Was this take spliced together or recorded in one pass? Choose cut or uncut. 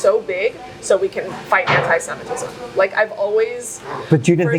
uncut